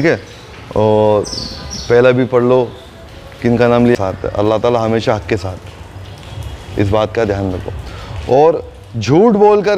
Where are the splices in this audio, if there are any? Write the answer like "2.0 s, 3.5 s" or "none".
4.0 s